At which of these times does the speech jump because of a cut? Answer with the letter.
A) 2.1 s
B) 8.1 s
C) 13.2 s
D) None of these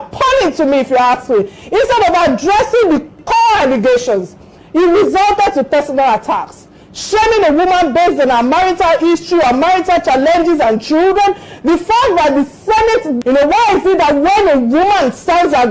C